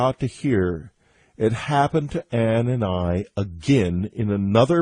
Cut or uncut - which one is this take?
uncut